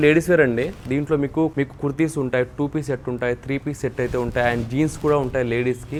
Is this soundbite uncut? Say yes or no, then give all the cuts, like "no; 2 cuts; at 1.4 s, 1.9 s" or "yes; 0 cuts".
yes; 0 cuts